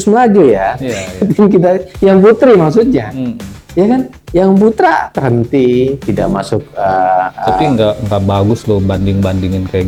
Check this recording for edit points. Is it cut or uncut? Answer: uncut